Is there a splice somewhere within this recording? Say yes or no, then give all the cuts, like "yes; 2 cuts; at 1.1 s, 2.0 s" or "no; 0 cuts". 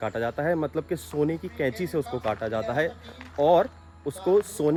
no; 0 cuts